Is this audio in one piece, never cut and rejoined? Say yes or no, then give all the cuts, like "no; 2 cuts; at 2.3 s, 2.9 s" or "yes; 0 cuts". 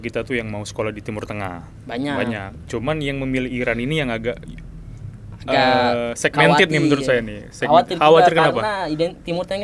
yes; 0 cuts